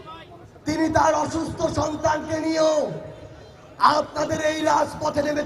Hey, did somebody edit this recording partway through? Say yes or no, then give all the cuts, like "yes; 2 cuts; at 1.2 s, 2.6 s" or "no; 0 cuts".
no; 0 cuts